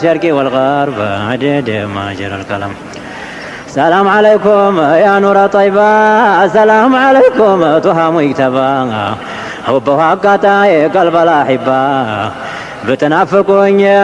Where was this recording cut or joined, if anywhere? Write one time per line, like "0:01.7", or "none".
none